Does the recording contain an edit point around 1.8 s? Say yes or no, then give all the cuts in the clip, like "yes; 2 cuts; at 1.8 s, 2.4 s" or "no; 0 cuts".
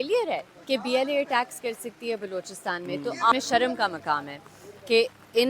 no; 1 cut; at 3.3 s